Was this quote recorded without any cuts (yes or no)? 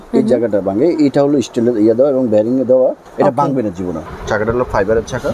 no